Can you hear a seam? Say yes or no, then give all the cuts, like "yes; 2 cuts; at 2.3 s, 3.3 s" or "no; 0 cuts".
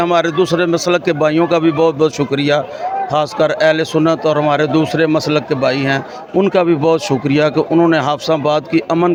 no; 0 cuts